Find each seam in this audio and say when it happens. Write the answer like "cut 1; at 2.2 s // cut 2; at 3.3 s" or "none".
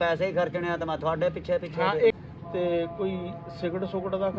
cut 1; at 2.2 s